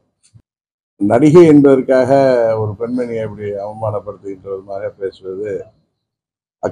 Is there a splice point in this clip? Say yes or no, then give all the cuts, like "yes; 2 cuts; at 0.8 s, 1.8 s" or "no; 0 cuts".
no; 0 cuts